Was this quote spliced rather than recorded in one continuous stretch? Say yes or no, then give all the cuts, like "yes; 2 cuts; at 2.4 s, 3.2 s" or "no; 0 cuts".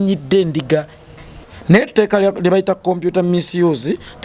yes; 1 cut; at 1.4 s